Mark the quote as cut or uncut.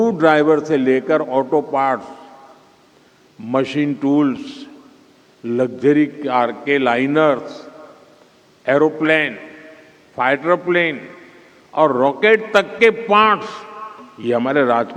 uncut